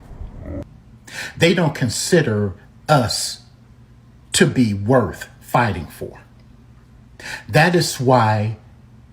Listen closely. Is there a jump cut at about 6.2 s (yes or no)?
yes